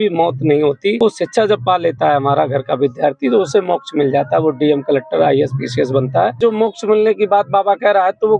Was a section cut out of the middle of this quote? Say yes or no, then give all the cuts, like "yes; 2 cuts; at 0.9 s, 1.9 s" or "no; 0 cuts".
yes; 2 cuts; at 1.0 s, 6.4 s